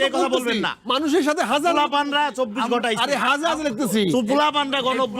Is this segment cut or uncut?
uncut